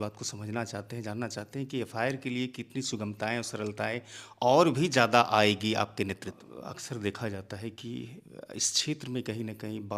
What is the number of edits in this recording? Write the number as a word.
one